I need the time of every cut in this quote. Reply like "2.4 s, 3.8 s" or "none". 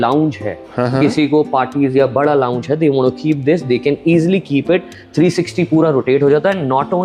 none

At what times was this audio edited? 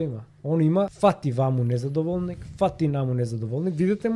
0.9 s

